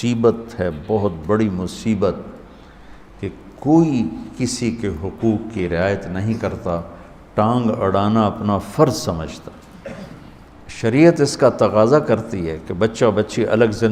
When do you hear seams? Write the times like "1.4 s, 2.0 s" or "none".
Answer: 10.5 s